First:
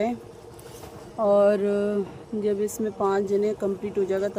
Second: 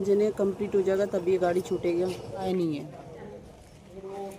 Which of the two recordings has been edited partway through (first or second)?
second